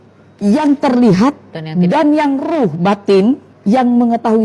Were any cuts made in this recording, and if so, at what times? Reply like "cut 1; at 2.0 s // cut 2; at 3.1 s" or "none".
cut 1; at 3.5 s